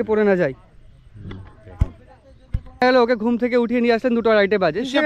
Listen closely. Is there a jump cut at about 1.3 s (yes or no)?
no